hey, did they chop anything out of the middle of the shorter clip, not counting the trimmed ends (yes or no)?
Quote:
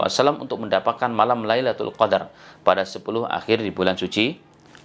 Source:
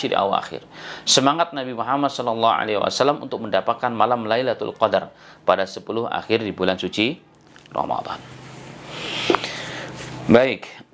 no